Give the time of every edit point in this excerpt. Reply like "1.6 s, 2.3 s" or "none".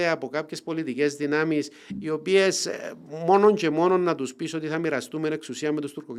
none

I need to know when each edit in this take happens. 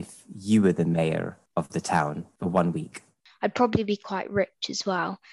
1.4 s, 2.3 s, 3.2 s

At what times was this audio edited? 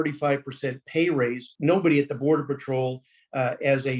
1.5 s

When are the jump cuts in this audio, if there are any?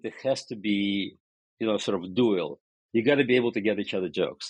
none

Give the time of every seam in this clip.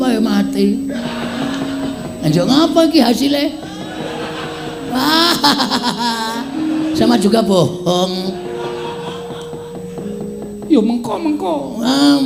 none

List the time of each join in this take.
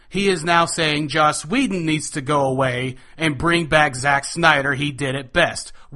none

